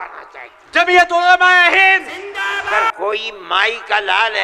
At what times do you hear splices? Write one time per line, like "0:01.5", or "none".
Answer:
0:02.8